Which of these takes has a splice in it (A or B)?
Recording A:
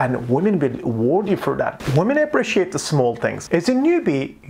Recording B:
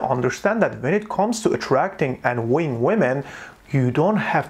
A